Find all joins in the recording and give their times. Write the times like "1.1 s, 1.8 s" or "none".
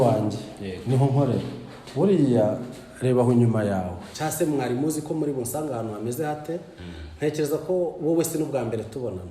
4.0 s

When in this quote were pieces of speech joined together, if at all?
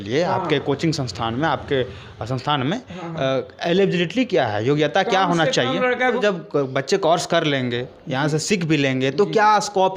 6.2 s

